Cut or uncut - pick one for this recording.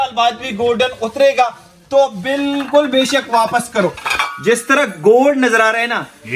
cut